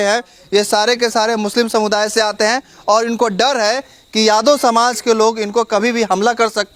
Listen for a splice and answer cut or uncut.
uncut